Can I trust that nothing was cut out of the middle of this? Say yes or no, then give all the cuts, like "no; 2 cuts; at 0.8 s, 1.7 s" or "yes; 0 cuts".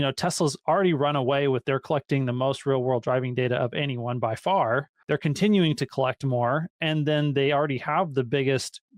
no; 1 cut; at 4.9 s